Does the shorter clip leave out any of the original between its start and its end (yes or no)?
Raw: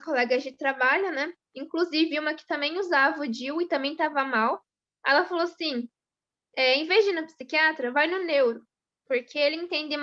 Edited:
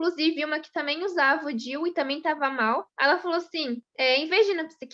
yes